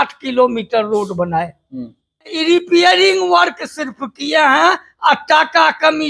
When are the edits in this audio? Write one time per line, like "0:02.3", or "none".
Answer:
0:02.3

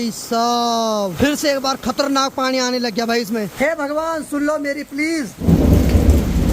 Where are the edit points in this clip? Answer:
0:01.1
0:03.5
0:05.5

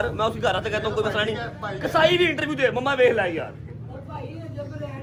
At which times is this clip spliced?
none

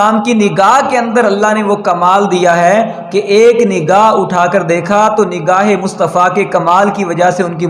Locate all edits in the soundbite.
none

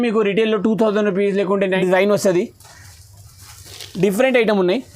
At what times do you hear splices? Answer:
0:01.8

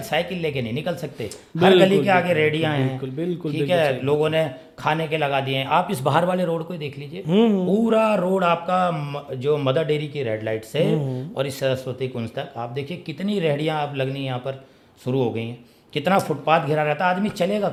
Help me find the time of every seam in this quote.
none

